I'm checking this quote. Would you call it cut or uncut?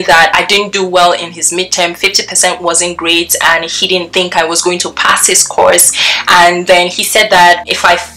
uncut